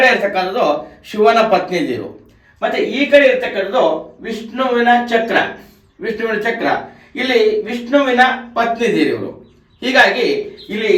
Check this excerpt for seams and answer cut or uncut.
uncut